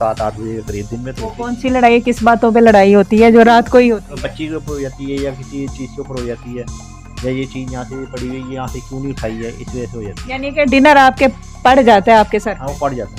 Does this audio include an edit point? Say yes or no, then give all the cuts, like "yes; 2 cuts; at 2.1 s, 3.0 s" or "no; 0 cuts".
no; 0 cuts